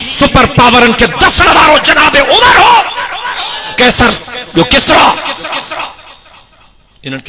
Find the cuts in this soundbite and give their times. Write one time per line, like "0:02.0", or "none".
0:03.8